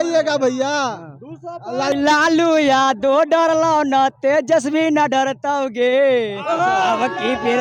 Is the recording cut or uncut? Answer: cut